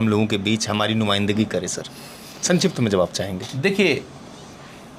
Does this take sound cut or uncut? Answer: uncut